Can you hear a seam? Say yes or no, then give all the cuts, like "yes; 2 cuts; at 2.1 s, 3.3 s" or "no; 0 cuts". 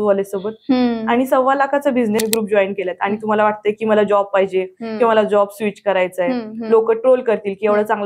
yes; 1 cut; at 2.2 s